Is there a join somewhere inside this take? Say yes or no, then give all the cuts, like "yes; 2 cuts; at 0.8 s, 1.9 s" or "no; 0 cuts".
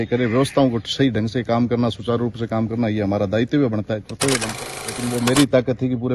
yes; 1 cut; at 4.5 s